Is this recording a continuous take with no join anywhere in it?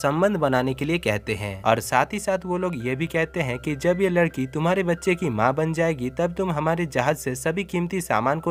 yes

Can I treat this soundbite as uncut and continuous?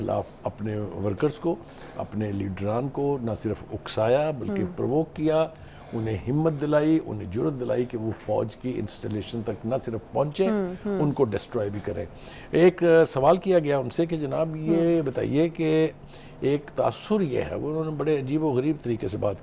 yes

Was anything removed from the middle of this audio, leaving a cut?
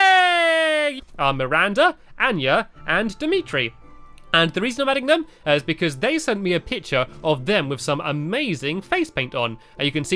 no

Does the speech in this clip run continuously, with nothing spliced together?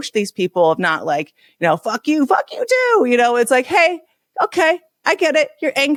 yes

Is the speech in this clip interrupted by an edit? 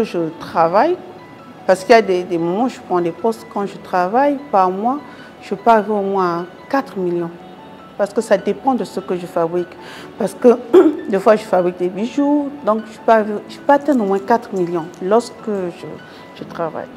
no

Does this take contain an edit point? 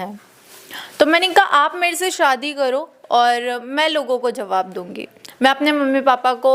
no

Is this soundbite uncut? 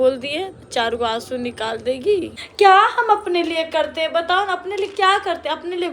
no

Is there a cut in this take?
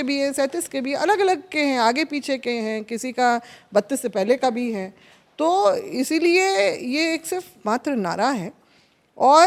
no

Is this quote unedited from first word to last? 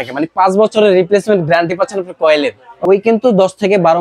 no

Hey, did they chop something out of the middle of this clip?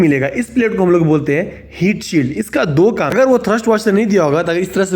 yes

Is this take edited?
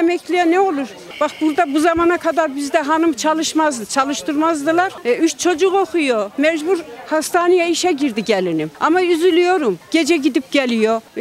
yes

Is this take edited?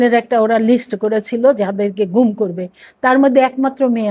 no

